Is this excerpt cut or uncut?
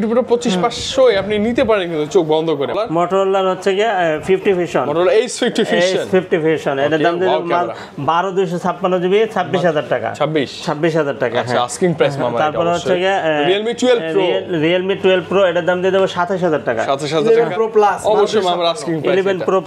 cut